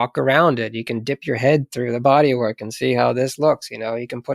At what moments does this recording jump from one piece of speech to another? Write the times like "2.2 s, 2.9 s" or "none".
none

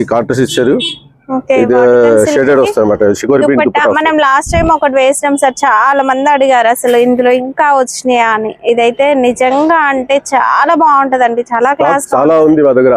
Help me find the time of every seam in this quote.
none

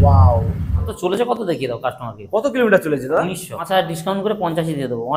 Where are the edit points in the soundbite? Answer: 0.9 s, 3.5 s

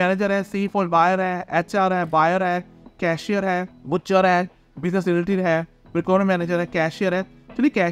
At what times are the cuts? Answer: none

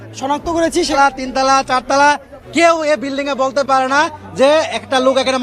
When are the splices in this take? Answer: 0.9 s

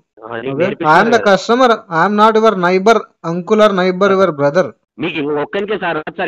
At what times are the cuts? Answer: 4.8 s

